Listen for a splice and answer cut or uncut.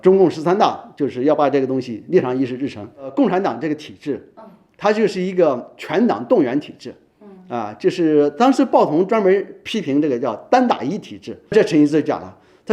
cut